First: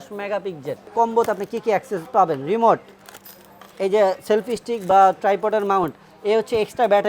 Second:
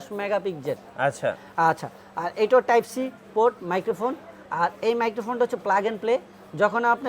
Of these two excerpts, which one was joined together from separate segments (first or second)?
first